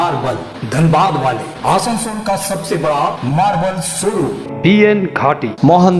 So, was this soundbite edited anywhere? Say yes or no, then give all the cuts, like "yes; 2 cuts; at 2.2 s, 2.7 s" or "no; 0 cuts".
no; 0 cuts